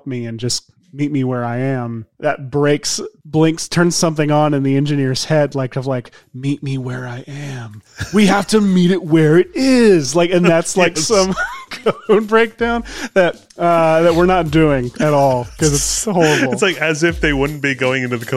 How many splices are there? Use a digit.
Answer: 1